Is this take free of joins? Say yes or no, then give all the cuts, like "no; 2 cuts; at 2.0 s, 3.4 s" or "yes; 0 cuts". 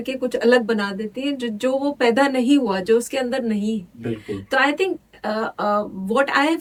yes; 0 cuts